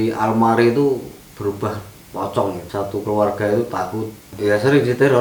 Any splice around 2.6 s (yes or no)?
yes